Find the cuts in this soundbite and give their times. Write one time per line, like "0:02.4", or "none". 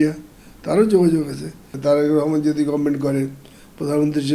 0:01.7